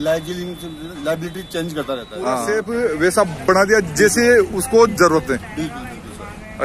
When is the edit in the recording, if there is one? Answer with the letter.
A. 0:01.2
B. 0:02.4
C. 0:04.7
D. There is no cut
B